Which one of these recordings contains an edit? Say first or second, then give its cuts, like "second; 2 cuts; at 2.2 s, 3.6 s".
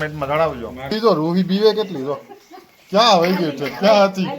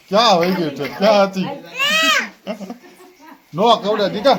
first; 1 cut; at 0.9 s